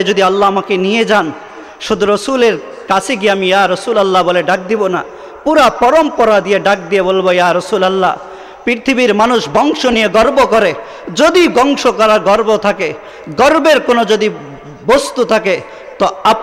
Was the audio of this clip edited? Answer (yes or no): no